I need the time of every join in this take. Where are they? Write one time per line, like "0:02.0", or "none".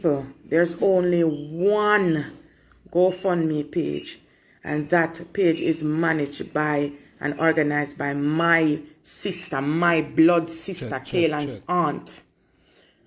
none